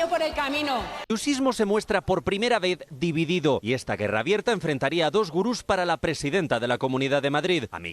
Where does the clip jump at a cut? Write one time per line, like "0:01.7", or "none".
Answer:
0:00.9